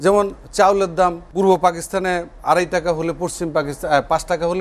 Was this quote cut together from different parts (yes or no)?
yes